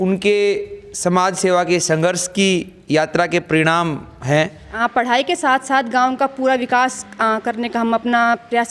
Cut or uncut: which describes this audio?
cut